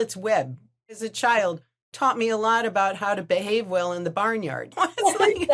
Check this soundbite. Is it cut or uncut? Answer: cut